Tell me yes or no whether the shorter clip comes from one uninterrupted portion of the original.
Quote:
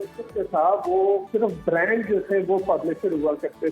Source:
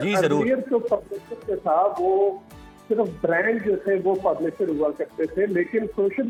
no